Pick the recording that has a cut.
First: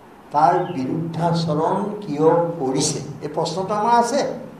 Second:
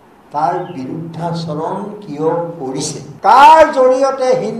second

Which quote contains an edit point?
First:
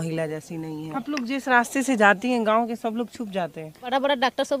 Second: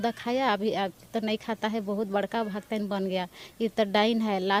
first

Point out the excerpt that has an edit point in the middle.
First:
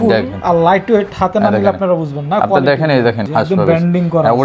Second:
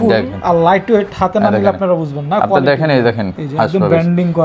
first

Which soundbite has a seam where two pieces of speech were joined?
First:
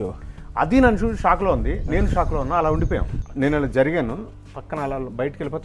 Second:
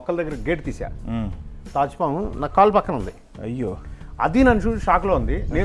first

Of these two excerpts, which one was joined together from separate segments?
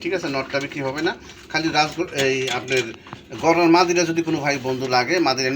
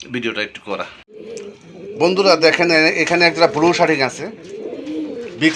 second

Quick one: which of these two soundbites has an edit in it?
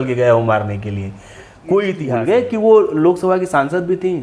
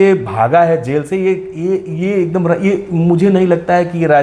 first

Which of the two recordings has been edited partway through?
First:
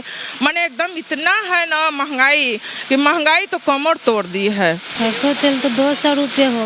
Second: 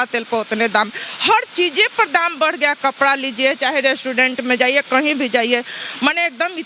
first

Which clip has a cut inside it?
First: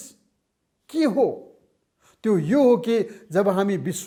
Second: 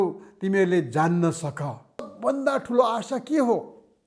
second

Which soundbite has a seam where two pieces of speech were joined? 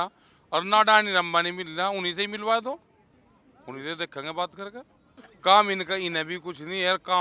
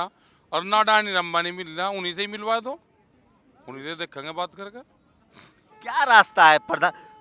first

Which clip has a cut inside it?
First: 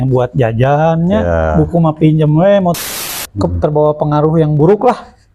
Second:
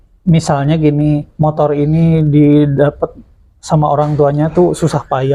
first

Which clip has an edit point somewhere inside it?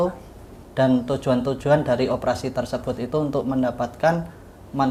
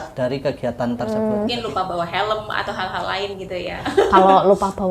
second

